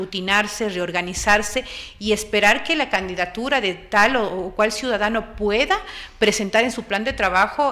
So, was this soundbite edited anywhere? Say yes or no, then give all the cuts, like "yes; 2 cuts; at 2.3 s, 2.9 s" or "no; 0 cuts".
no; 0 cuts